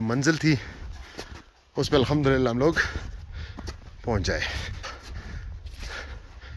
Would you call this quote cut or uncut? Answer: cut